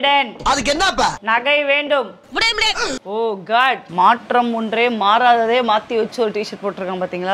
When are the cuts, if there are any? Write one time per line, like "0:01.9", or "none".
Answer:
0:03.8

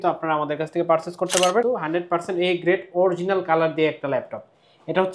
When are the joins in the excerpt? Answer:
0:01.6

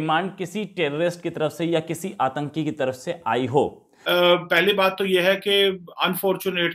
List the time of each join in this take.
0:03.9

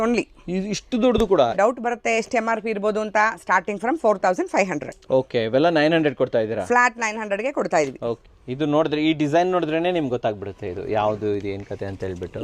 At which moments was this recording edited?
0:01.5
0:08.2

